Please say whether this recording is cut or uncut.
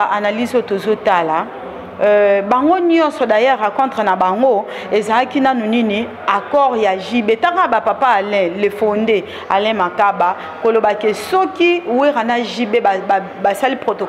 uncut